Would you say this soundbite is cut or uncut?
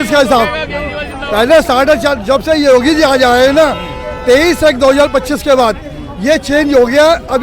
uncut